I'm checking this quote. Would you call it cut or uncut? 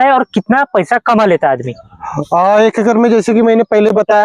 uncut